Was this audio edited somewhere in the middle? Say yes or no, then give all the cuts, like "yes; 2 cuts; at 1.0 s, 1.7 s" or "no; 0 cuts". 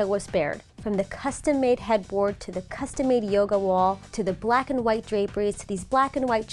no; 0 cuts